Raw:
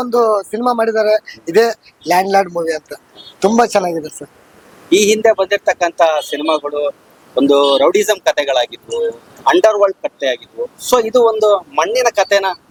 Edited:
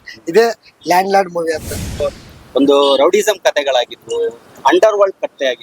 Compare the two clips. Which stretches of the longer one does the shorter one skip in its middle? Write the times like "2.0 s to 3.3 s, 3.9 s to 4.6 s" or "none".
3.2 s to 6.8 s